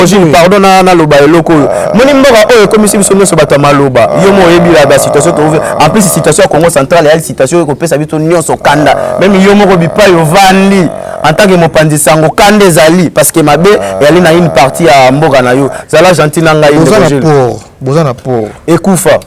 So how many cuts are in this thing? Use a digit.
0